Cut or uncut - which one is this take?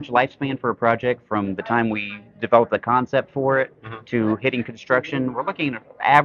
uncut